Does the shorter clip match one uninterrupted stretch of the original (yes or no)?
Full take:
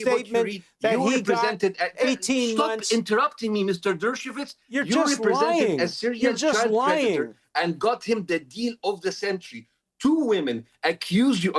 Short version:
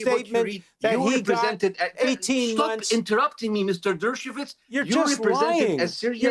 yes